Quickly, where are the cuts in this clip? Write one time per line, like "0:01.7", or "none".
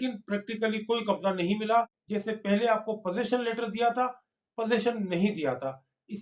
0:02.0

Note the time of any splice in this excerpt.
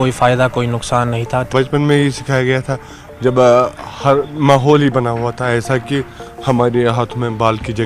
0:01.5

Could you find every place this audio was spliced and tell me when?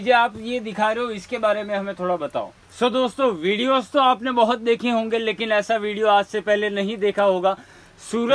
0:02.6

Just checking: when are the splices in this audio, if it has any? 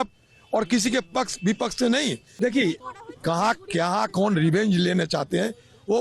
0:02.3

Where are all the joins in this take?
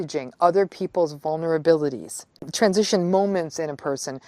0:02.5

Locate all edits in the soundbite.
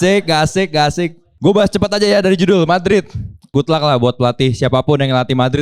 0:01.2
0:03.5

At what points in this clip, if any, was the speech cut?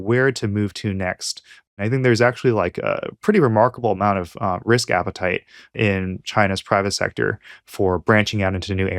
0:01.7
0:05.7

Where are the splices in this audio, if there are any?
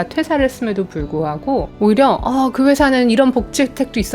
0:01.7

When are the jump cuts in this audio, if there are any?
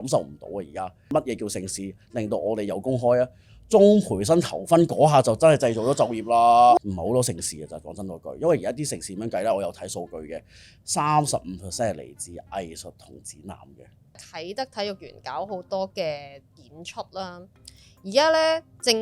0:01.1
0:06.8
0:14.2

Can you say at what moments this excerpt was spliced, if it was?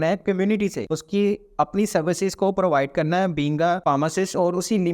0:00.9
0:03.8

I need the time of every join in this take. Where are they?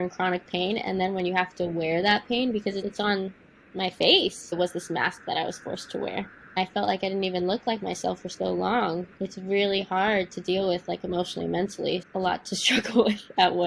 0:04.5
0:06.6
0:09.1
0:12.0

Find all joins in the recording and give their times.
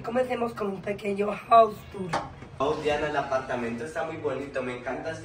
0:02.6

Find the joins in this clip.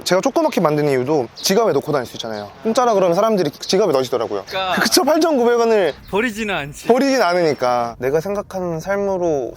0:04.5
0:07.9

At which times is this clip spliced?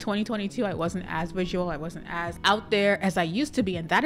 0:02.3

